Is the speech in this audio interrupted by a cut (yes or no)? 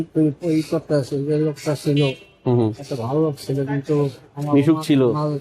no